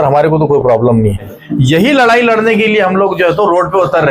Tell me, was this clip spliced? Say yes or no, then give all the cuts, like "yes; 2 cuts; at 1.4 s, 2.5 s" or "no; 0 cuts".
yes; 1 cut; at 1.3 s